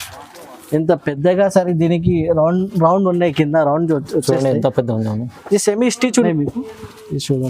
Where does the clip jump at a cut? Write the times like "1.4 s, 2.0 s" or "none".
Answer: 6.1 s

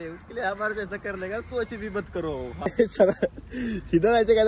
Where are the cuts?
2.7 s

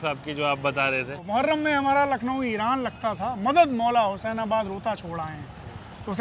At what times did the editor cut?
none

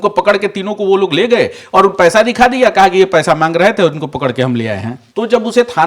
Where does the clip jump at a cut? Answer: 5.0 s

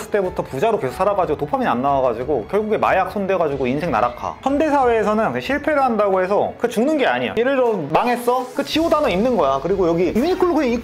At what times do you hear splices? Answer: 4.4 s

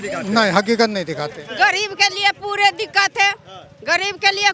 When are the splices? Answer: 1.4 s

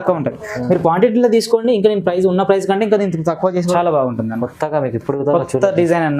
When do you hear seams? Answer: 3.7 s

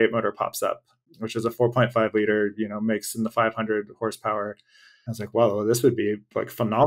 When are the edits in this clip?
none

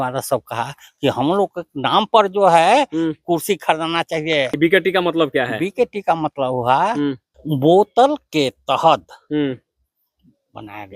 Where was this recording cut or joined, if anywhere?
4.6 s, 7.3 s

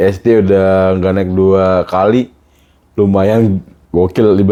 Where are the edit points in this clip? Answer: none

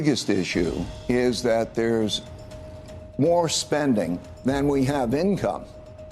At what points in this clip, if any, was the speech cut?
0.9 s, 4.3 s

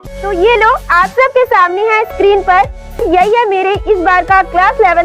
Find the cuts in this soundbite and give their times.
3.0 s

